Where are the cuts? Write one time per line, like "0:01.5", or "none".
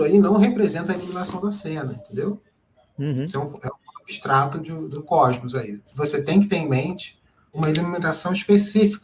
0:04.9
0:05.8
0:07.5